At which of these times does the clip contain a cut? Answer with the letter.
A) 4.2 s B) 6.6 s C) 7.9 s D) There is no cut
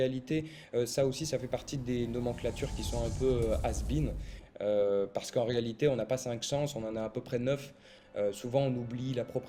D